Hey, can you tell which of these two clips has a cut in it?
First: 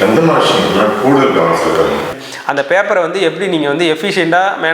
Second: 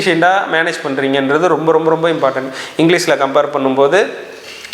first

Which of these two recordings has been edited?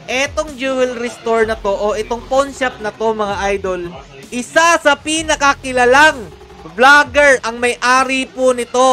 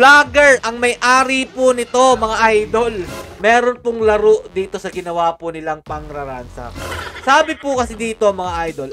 second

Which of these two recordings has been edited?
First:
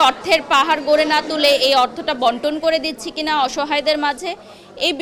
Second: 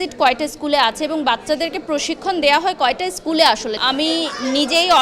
second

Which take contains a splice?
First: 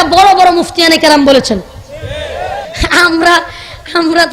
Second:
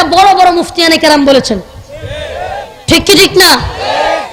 first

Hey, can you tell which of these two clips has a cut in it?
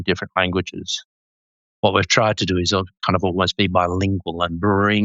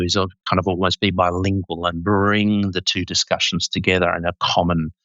first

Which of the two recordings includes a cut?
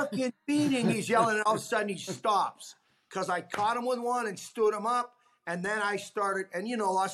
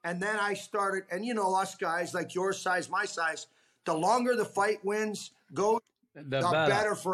first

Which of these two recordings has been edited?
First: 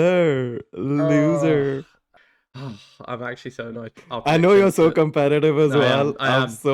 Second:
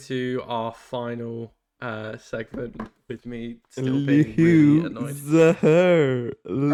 first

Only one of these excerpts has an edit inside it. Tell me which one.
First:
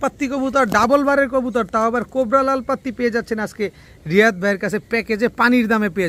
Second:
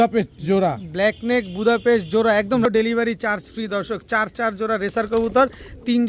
second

